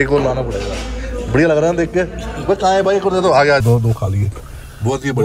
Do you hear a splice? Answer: yes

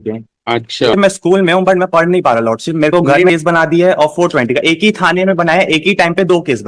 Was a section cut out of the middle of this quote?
yes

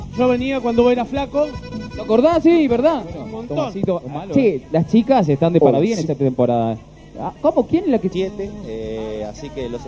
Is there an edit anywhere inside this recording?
no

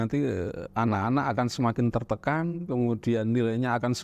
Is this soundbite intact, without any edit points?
yes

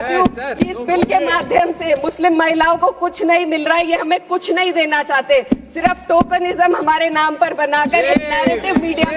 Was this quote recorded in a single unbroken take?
yes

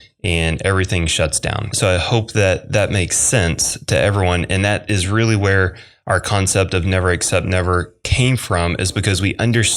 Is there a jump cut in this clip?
yes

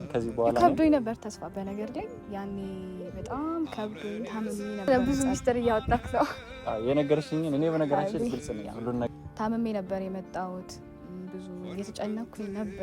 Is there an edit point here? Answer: yes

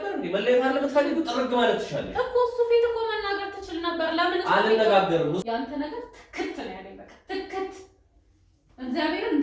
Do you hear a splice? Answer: yes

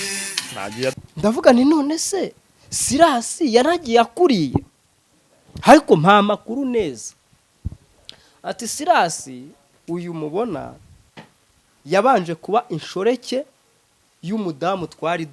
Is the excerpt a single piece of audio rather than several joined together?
no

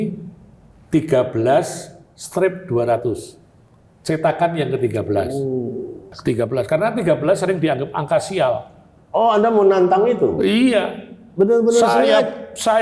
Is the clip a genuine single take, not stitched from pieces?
no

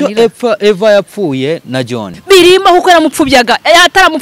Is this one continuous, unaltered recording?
no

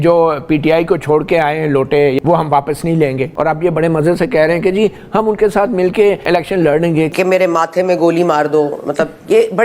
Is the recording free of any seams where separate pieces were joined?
no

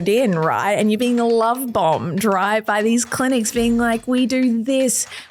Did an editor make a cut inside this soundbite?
no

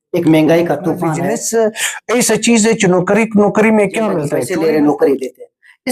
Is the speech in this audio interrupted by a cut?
yes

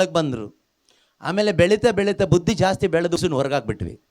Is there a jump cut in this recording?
yes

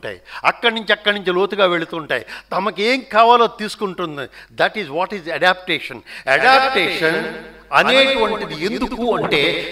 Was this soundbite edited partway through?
no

